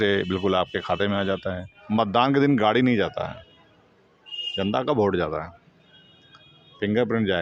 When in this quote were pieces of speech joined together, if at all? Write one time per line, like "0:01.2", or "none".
0:01.7